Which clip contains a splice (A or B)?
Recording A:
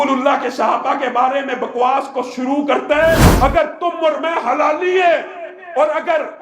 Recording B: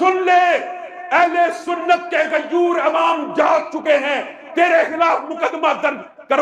A